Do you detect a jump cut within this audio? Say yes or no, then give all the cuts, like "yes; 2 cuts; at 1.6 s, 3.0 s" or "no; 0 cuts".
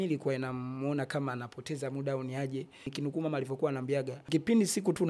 yes; 2 cuts; at 2.9 s, 4.2 s